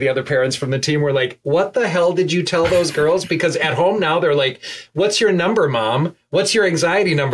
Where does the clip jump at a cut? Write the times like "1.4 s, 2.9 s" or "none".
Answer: none